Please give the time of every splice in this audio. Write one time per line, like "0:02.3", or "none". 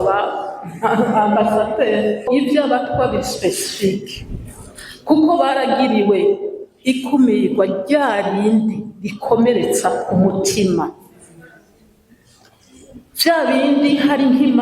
0:02.3